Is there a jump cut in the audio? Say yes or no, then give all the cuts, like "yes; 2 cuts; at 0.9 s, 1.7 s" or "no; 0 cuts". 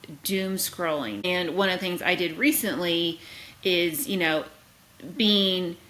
yes; 1 cut; at 1.2 s